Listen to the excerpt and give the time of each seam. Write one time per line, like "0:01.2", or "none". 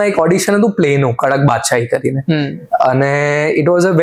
none